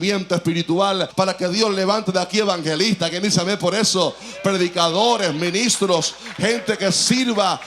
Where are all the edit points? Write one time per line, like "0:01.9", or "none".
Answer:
0:01.1